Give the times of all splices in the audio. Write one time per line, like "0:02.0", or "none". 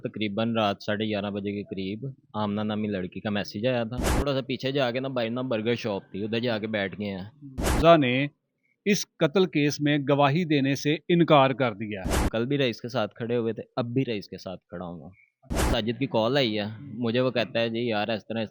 0:04.2
0:07.8
0:12.3
0:15.7